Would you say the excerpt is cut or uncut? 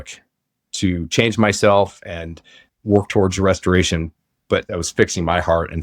cut